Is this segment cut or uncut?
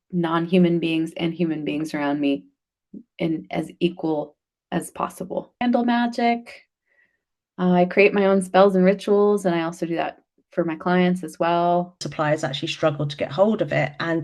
cut